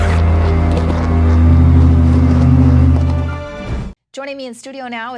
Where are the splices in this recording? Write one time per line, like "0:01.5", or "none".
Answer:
0:03.3